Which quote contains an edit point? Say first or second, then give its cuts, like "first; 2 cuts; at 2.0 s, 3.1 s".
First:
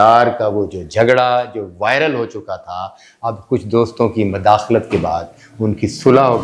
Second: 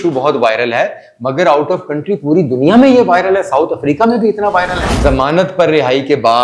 second; 1 cut; at 4.8 s